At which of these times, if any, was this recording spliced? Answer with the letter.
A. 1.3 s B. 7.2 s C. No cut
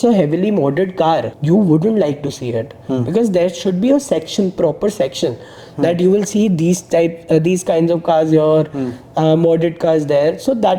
A